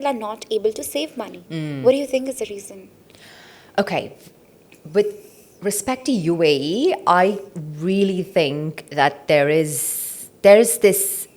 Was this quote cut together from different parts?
no; 0 cuts

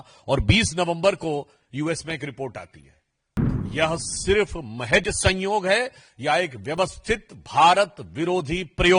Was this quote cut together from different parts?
yes; 1 cut; at 3.4 s

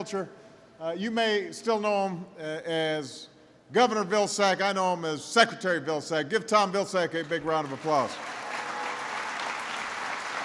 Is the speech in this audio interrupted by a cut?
no; 0 cuts

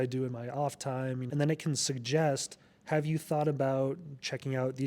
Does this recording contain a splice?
yes; 1 cut; at 1.2 s

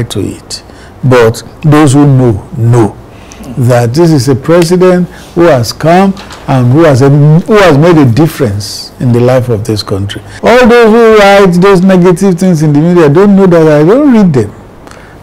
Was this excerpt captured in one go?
no; 1 cut; at 10.2 s

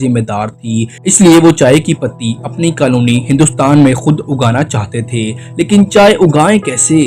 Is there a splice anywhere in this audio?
no; 0 cuts

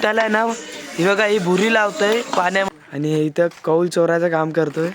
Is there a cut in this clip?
yes; 1 cut; at 2.7 s

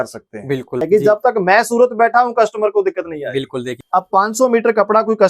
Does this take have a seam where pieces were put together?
yes; 2 cuts; at 0.9 s, 3.8 s

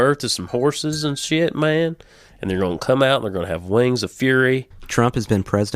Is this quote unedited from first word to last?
no; 1 cut; at 4.8 s

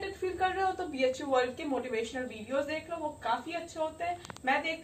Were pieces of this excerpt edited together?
no; 0 cuts

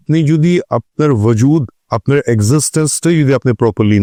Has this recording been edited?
no; 0 cuts

